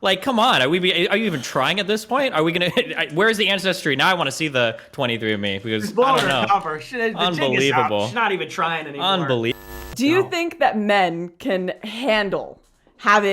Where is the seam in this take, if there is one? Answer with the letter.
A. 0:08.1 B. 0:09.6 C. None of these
B